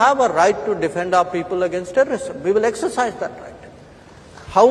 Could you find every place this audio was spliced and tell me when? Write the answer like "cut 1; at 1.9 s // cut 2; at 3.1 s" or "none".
cut 1; at 2.3 s